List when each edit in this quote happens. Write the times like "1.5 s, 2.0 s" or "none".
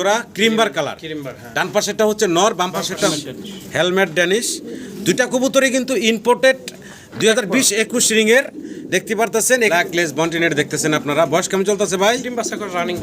3.1 s, 9.7 s